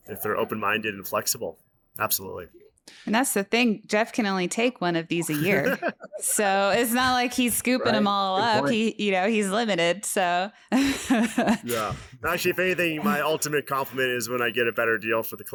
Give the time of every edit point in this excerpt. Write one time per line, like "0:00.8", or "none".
none